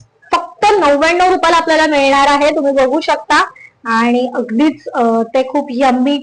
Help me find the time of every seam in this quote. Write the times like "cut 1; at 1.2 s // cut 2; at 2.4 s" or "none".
none